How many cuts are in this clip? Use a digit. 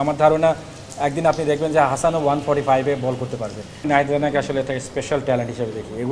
1